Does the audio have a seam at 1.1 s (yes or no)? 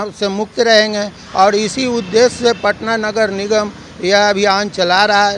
no